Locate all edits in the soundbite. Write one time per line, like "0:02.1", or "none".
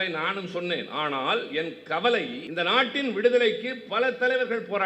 0:02.4